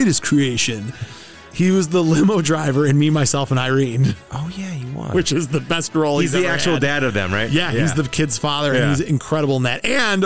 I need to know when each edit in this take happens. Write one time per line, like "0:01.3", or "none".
none